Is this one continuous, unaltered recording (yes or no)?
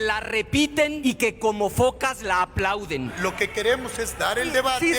no